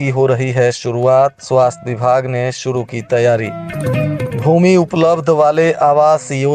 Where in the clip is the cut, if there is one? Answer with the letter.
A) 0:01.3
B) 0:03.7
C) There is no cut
C